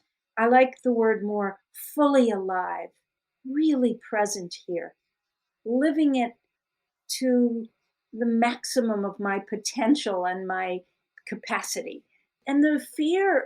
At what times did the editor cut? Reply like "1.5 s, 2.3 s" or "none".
12.4 s